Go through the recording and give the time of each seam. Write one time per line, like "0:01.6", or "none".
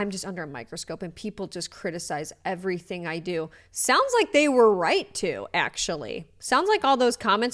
none